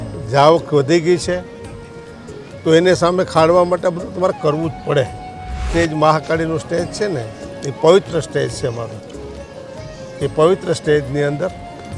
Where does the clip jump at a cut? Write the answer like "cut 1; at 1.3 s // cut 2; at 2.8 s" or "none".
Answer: cut 1; at 5.6 s